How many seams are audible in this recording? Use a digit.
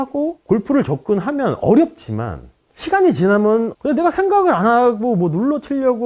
1